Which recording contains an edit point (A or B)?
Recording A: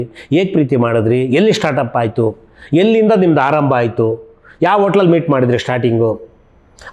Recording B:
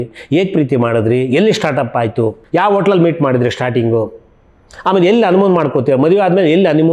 B